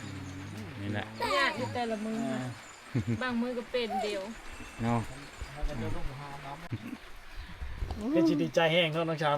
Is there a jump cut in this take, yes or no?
yes